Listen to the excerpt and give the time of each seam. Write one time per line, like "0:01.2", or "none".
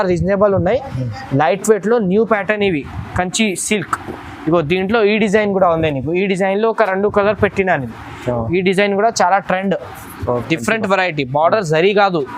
0:10.4